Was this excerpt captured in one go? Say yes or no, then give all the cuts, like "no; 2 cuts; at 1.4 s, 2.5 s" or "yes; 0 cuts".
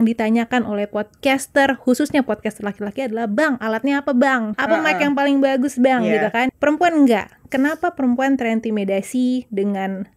no; 2 cuts; at 4.5 s, 6.5 s